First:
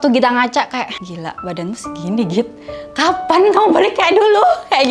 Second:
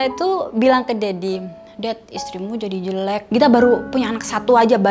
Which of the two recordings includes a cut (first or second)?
second